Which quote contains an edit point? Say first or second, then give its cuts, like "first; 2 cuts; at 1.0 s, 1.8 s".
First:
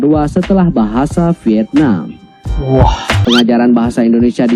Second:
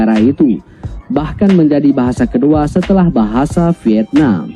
first; 1 cut; at 3.1 s